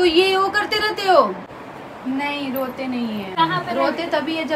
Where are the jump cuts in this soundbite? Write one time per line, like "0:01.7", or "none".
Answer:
0:01.6
0:03.3